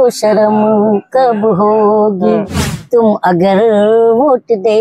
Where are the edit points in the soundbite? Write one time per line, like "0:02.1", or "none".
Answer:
0:02.8